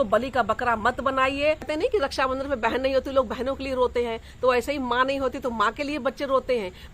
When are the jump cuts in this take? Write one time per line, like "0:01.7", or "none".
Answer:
0:01.7